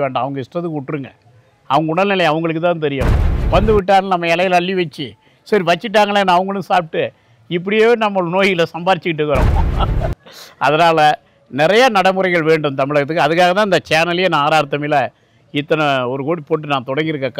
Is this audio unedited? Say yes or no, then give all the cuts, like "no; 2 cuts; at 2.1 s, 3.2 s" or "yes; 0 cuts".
yes; 0 cuts